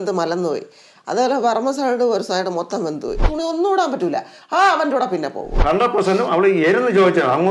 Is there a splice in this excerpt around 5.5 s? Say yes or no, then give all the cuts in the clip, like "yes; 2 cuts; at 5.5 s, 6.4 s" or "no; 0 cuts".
yes; 2 cuts; at 3.2 s, 5.5 s